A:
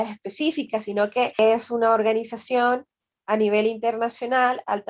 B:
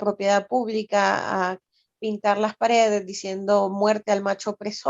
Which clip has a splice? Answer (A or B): A